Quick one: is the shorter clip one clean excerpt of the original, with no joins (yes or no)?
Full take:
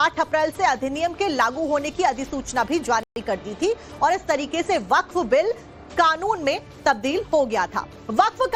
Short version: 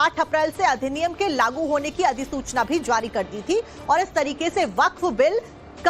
no